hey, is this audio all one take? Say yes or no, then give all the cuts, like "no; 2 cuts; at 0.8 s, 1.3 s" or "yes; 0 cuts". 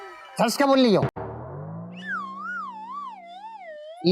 yes; 0 cuts